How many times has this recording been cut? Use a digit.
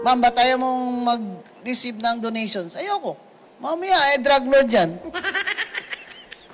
0